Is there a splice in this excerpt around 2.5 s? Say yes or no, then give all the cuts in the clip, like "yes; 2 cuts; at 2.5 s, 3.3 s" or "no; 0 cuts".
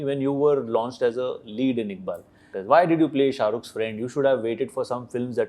yes; 1 cut; at 2.5 s